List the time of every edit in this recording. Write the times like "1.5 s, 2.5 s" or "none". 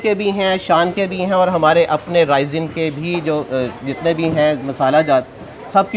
none